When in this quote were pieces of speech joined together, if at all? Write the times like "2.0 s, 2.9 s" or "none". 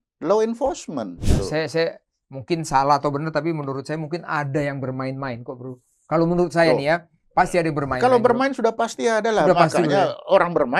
1.3 s